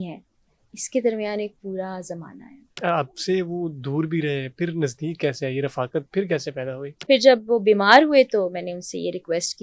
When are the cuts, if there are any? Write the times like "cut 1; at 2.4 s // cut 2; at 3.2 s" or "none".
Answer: cut 1; at 6.9 s